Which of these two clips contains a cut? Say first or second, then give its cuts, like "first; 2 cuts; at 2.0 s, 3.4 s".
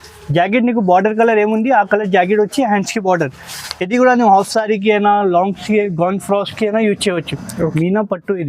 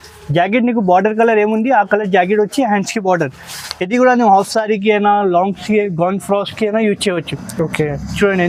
first; 1 cut; at 7.5 s